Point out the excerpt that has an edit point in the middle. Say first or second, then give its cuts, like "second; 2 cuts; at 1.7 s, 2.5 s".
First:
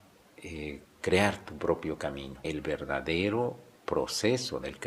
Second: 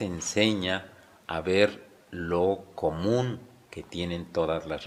first; 1 cut; at 2.3 s